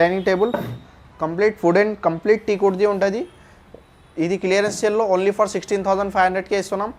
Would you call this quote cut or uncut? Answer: uncut